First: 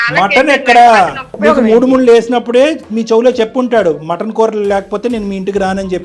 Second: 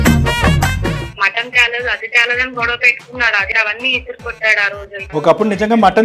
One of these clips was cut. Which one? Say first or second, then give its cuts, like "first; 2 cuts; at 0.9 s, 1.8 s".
second; 3 cuts; at 1.1 s, 3.5 s, 5.1 s